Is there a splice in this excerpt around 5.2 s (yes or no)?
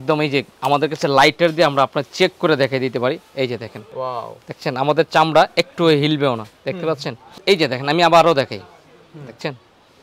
no